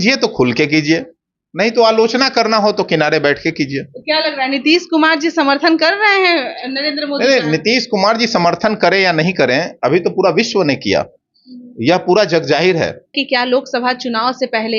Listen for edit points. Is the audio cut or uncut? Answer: cut